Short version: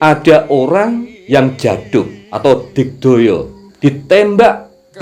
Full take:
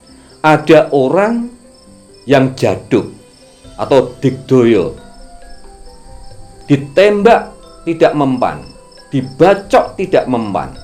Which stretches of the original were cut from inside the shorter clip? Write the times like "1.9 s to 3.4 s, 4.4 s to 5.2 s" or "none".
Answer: 1.5 s to 2.1 s, 3.2 s to 3.7 s, 5.1 s to 6.5 s